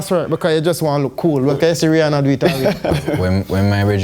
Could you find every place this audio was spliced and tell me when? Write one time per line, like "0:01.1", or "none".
0:03.0